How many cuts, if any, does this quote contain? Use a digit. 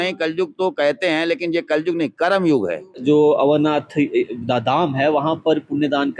1